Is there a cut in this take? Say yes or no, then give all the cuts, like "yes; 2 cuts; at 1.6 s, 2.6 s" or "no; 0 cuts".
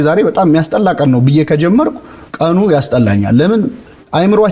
no; 0 cuts